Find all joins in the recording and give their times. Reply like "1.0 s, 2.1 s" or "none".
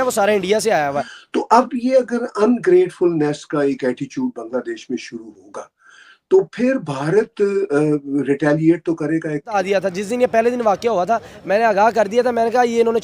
1.1 s, 9.5 s